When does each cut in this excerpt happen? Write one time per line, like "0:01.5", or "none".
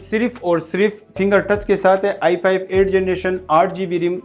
0:01.1